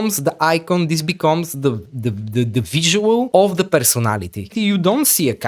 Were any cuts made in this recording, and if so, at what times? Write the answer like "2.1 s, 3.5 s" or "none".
3.3 s, 4.5 s